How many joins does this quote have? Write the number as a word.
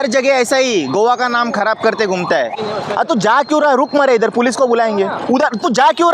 one